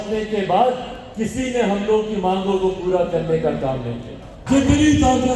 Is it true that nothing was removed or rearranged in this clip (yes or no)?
no